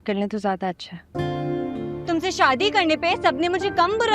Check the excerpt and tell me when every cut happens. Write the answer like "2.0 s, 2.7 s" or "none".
2.0 s